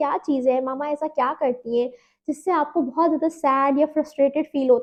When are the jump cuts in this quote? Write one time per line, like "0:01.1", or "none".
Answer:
none